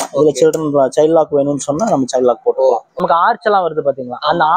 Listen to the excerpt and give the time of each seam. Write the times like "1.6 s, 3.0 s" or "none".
3.0 s

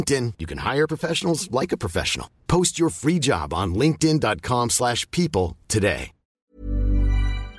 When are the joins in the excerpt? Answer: 6.5 s

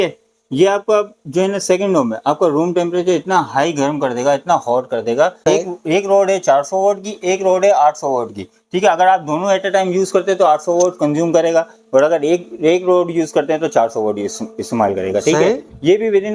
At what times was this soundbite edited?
5.4 s

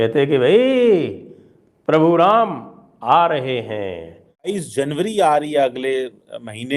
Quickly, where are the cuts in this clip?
4.5 s

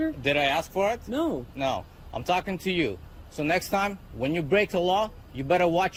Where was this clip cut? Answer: none

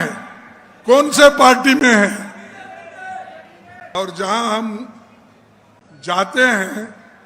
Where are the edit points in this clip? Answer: 4.0 s

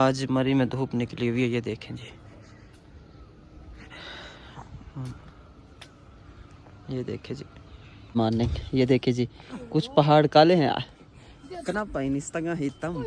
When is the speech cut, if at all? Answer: 8.1 s

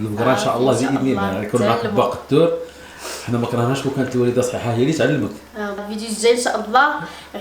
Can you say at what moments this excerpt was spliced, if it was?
5.8 s

